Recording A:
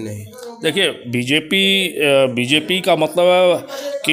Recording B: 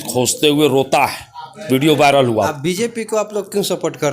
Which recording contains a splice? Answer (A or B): B